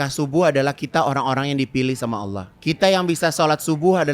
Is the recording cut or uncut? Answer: cut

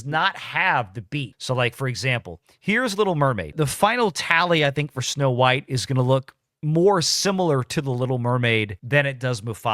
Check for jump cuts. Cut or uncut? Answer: cut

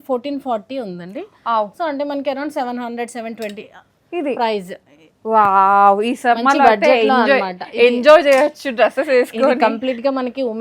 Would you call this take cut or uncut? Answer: uncut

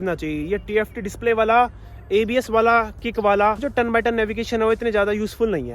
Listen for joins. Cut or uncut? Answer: cut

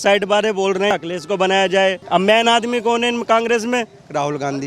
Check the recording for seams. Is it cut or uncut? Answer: cut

